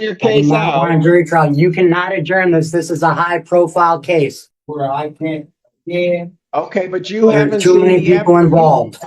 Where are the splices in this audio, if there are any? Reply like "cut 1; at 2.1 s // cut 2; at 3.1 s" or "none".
cut 1; at 4.5 s

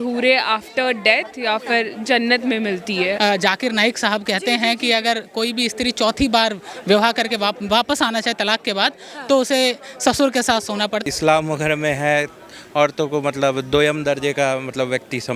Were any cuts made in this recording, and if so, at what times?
cut 1; at 3.2 s // cut 2; at 11.1 s

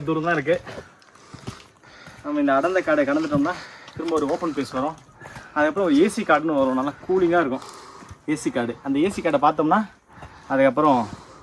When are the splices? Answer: none

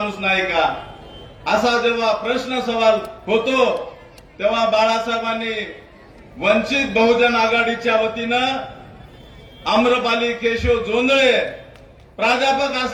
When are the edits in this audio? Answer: none

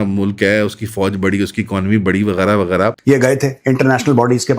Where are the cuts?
cut 1; at 2.9 s

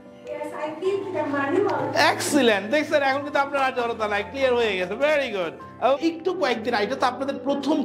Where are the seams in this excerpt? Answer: cut 1; at 6.0 s

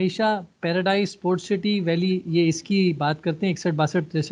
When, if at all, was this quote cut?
none

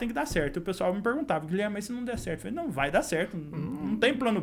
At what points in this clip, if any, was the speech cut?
none

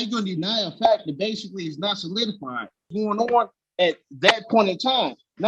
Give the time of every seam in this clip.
cut 1; at 2.9 s

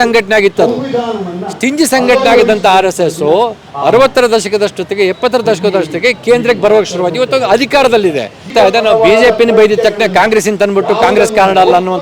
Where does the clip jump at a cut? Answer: cut 1; at 8.5 s

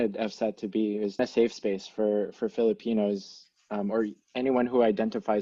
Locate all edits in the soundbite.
cut 1; at 1.2 s

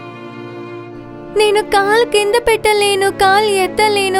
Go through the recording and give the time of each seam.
cut 1; at 1.3 s

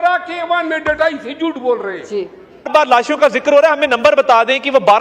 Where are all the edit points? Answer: cut 1; at 2.7 s

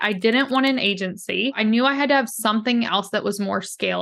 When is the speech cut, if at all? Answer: cut 1; at 1.6 s

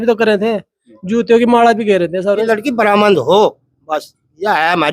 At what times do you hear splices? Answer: cut 1; at 2.5 s

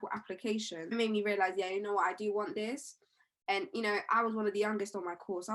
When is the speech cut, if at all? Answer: none

